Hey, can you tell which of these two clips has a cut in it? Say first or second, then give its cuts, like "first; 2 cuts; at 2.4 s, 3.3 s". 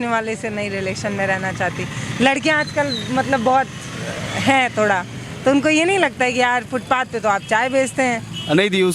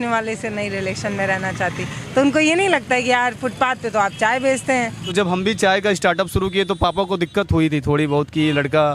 second; 2 cuts; at 1.9 s, 5.0 s